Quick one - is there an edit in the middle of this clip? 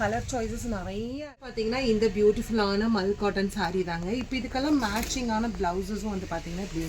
yes; 1 cut; at 1.5 s

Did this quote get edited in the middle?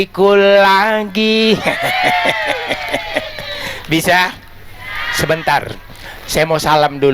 no; 0 cuts

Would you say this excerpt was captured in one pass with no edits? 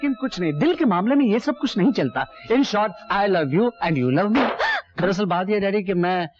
no; 1 cut; at 4.8 s

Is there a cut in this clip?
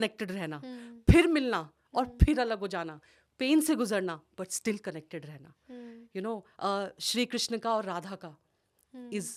no; 0 cuts

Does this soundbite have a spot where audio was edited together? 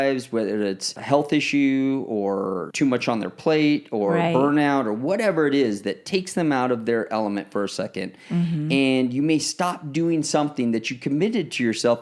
yes; 2 cuts; at 1.0 s, 2.6 s

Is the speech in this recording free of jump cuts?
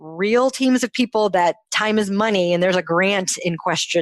yes; 0 cuts

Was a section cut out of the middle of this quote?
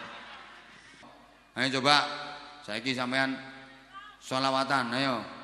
yes; 1 cut; at 1.0 s

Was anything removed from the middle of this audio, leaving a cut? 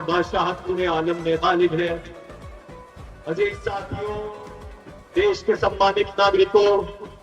no; 0 cuts

